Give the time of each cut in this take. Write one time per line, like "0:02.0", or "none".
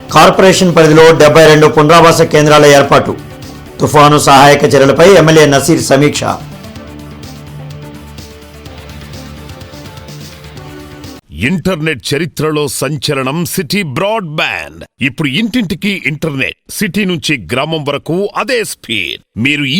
0:11.2